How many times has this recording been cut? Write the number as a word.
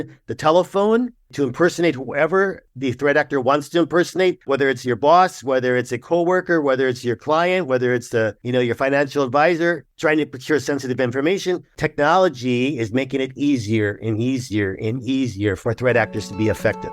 six